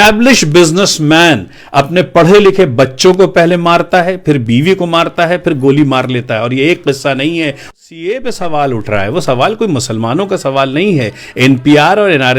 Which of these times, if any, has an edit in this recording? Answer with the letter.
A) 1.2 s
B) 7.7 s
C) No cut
B